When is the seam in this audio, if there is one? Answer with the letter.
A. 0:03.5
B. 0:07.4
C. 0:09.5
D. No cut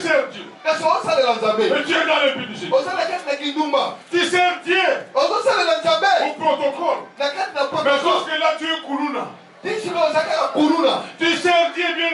D